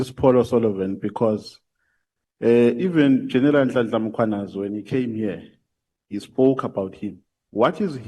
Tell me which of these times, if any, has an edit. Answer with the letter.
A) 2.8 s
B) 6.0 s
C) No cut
C